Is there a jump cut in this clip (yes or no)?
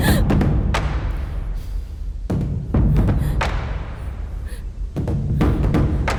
no